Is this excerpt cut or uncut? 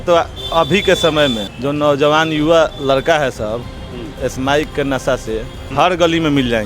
cut